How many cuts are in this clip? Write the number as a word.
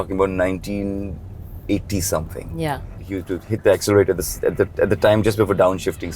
one